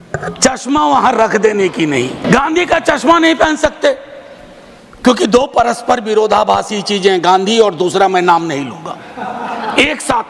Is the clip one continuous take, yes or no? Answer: no